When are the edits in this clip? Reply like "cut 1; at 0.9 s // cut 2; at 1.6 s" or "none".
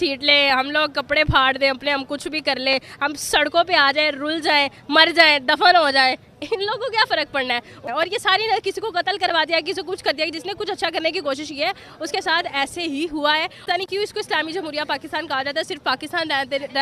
cut 1; at 7.9 s // cut 2; at 13.6 s